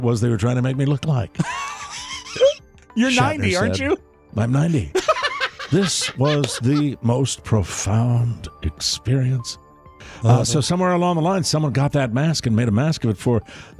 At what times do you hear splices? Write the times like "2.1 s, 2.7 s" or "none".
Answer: none